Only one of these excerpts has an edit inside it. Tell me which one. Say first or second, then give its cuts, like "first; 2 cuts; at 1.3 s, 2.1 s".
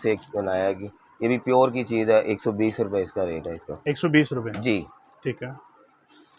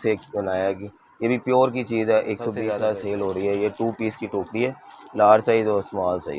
second; 1 cut; at 2.6 s